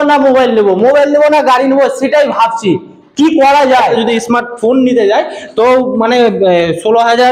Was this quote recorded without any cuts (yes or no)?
no